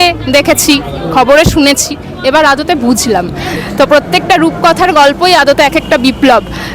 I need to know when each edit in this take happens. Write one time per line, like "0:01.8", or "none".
0:03.5